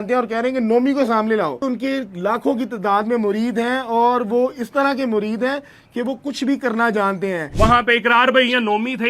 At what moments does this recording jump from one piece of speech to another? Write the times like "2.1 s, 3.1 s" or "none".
1.6 s, 7.4 s